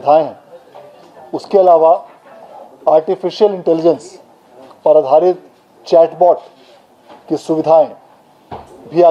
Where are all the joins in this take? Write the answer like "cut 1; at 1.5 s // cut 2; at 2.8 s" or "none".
none